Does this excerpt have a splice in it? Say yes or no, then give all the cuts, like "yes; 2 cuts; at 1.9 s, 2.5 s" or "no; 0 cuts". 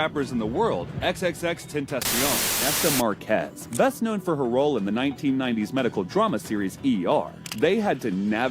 yes; 1 cut; at 2.5 s